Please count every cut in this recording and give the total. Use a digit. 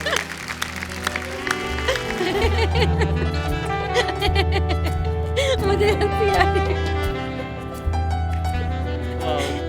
1